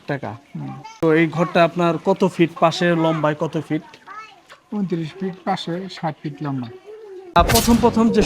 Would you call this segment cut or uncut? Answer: cut